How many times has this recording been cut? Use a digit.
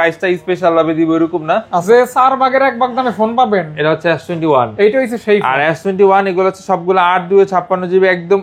1